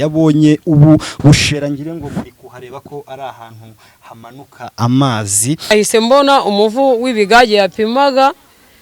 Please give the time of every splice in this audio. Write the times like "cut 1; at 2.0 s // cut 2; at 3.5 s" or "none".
cut 1; at 5.7 s